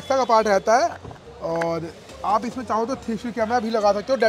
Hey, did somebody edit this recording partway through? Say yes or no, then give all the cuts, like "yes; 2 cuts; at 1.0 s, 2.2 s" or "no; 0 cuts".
no; 0 cuts